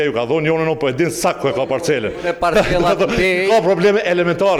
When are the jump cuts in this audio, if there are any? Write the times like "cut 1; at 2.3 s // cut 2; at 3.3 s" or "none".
none